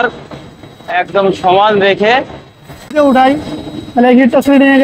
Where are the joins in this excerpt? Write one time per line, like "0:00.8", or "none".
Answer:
0:02.9